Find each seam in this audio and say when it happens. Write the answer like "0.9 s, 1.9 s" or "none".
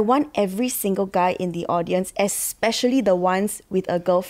none